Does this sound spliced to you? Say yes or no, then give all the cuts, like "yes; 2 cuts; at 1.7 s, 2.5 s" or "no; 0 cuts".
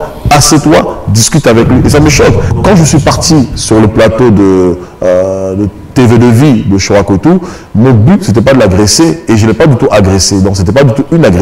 yes; 1 cut; at 2.4 s